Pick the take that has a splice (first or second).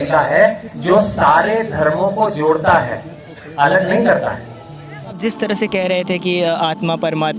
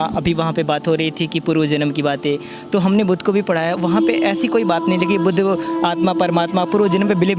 first